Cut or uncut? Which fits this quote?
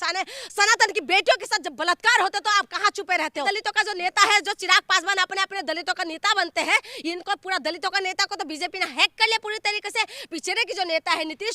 cut